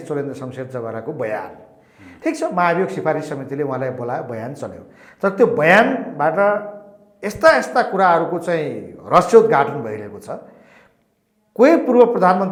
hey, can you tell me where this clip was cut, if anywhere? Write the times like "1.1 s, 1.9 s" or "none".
none